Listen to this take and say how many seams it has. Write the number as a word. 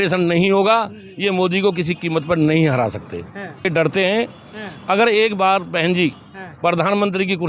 one